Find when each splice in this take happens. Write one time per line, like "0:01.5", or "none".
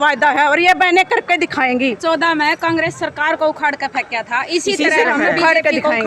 0:02.0